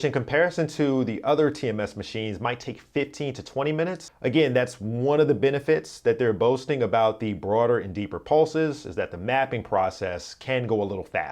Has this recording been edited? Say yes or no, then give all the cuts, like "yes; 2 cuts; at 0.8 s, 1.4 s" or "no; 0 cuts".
yes; 1 cut; at 4.1 s